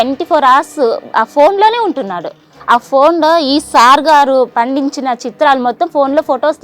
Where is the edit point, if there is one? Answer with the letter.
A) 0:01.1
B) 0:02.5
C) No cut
B